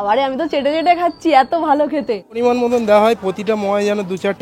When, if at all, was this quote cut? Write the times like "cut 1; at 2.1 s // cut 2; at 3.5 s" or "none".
cut 1; at 2.3 s

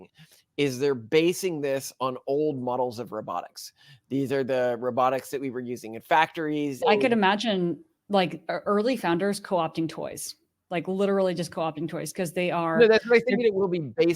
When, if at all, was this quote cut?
cut 1; at 6.8 s

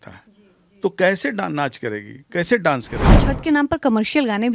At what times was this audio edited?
cut 1; at 3.1 s

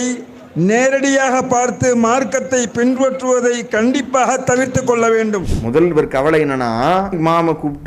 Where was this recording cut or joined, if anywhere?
cut 1; at 5.5 s // cut 2; at 7.1 s

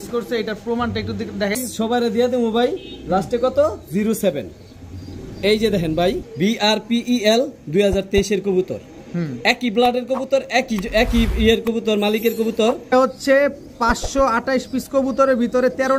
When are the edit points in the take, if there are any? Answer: cut 1; at 1.6 s // cut 2; at 6.3 s // cut 3; at 12.9 s

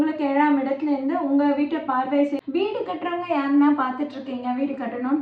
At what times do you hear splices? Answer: cut 1; at 2.4 s

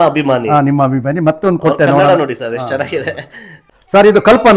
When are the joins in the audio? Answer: cut 1; at 3.6 s

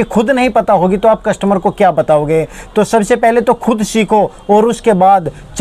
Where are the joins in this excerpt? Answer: none

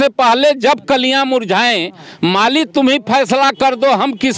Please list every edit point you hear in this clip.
none

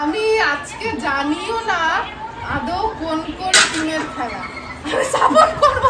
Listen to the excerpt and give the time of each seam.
none

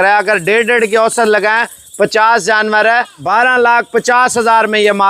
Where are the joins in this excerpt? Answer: cut 1; at 3.2 s

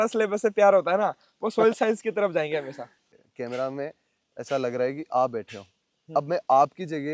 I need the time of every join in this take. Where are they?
cut 1; at 3.1 s

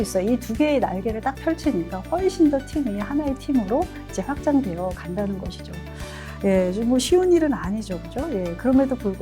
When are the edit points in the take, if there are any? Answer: none

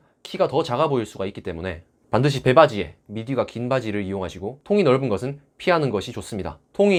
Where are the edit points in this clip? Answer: none

